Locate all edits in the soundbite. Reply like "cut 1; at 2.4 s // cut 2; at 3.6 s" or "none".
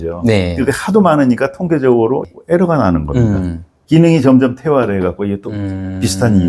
cut 1; at 3.7 s